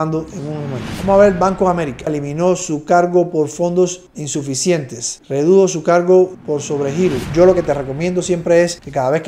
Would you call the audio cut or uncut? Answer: cut